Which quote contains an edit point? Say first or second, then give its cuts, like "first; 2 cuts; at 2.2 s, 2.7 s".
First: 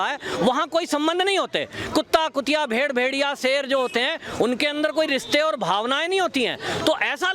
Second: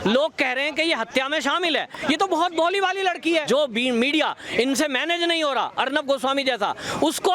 second; 1 cut; at 3.4 s